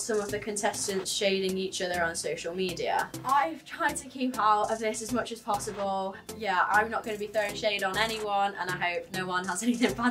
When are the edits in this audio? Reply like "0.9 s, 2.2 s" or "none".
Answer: none